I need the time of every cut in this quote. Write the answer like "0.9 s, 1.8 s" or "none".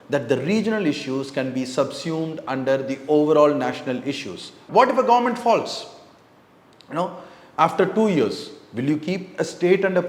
4.6 s